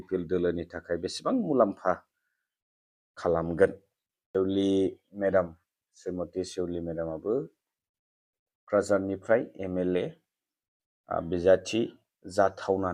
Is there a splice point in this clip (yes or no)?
yes